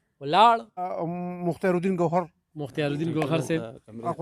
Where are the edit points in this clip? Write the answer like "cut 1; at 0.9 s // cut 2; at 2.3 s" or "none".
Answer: cut 1; at 0.9 s